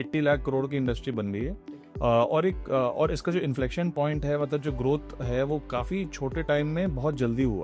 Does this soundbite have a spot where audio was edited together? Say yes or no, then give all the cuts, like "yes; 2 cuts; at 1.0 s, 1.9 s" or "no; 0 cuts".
no; 0 cuts